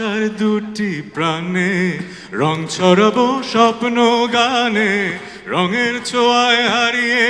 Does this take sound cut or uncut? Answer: uncut